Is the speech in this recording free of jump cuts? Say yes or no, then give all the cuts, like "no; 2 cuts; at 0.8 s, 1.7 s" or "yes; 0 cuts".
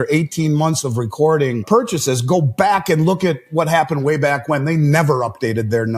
no; 1 cut; at 1.6 s